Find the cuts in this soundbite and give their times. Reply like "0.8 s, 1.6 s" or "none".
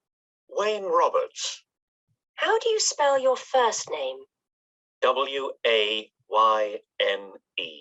6.9 s